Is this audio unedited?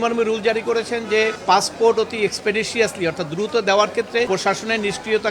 no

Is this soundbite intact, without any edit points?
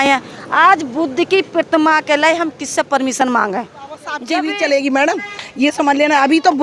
no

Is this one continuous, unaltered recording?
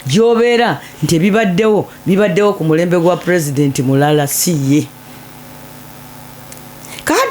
yes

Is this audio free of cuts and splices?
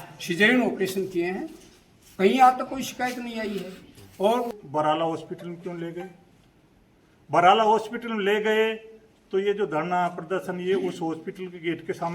no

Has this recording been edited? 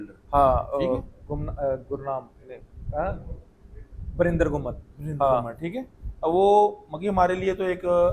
no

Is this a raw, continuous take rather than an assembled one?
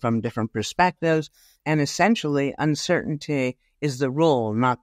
yes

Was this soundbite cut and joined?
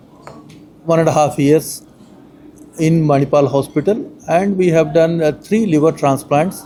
no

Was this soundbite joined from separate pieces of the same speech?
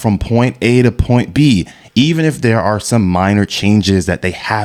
no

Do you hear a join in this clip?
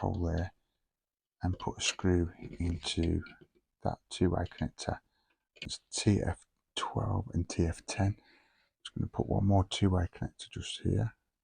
yes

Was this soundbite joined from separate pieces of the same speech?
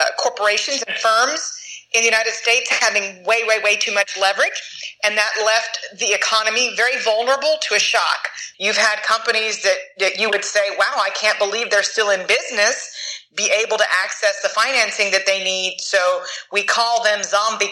yes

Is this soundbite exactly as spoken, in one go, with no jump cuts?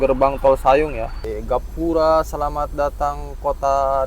no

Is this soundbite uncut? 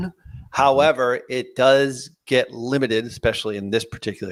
yes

